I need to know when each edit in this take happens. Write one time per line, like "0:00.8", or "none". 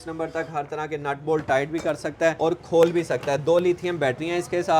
0:02.4